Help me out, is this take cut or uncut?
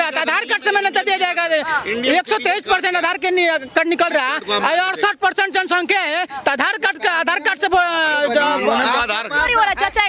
uncut